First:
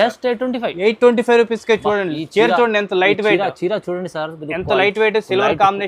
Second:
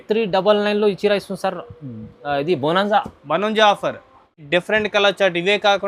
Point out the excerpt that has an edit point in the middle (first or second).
second